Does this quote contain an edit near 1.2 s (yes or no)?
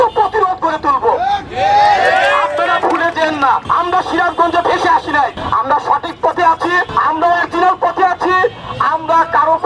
no